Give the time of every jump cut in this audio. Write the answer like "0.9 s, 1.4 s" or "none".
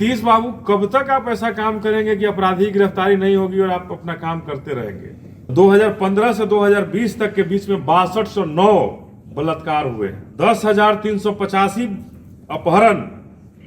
5.5 s, 10.2 s